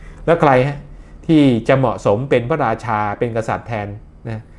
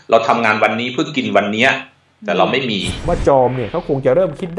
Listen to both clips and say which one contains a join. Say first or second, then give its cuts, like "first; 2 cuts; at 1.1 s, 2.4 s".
second; 1 cut; at 3.0 s